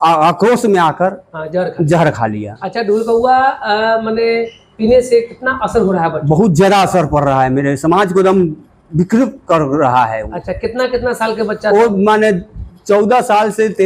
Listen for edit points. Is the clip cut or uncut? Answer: uncut